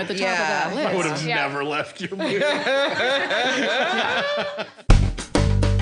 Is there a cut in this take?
yes; 1 cut; at 4.7 s

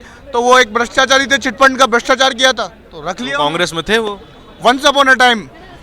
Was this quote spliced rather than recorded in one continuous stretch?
no; 0 cuts

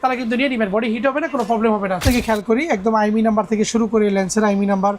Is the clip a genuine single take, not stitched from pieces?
no; 1 cut; at 2.0 s

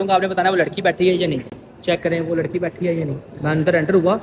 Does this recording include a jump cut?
no; 0 cuts

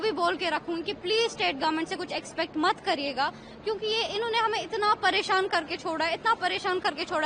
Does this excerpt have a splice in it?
no; 0 cuts

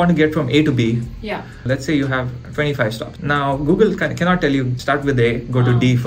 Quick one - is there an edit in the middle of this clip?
yes; 3 cuts; at 1.6 s, 3.1 s, 4.8 s

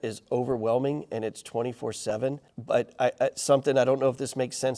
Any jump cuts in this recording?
yes; 1 cut; at 2.5 s

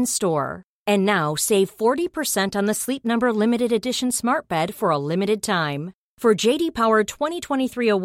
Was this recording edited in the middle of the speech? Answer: no; 0 cuts

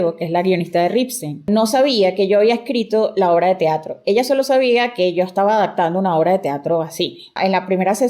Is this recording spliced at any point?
yes; 2 cuts; at 1.5 s, 7.4 s

